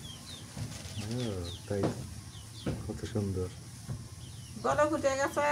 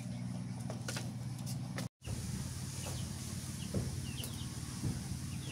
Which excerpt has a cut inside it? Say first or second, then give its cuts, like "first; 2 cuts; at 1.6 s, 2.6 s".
second; 1 cut; at 1.9 s